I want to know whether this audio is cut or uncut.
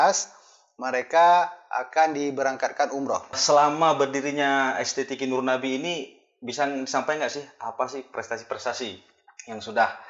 cut